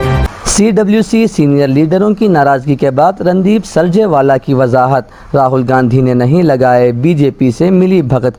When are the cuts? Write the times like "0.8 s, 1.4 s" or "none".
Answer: none